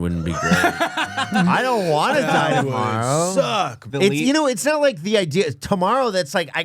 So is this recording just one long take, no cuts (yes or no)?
no